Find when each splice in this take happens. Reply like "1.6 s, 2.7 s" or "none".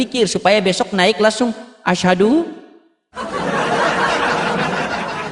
none